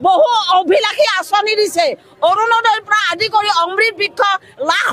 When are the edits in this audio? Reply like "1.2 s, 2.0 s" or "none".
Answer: none